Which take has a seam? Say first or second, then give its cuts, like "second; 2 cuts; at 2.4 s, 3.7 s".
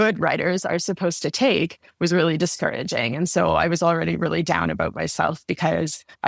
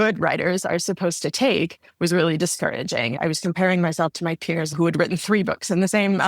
second; 2 cuts; at 3.1 s, 4.7 s